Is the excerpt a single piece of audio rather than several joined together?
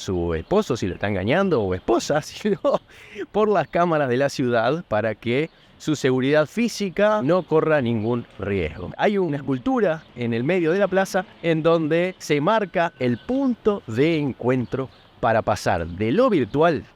yes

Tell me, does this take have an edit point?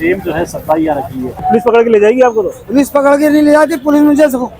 yes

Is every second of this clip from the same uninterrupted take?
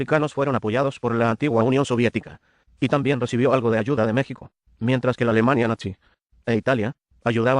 no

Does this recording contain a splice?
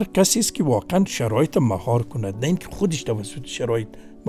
no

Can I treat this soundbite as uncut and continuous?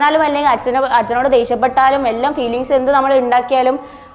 yes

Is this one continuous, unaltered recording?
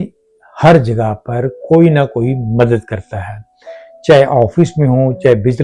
yes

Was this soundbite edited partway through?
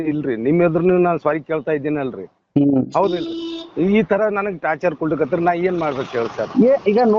no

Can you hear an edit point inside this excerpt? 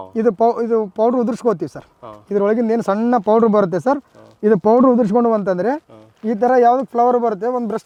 no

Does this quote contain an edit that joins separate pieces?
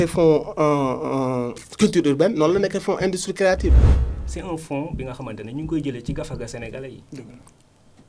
yes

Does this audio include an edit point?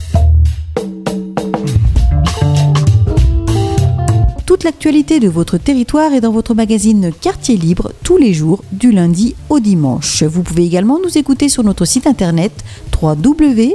no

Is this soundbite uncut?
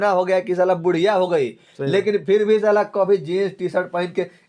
yes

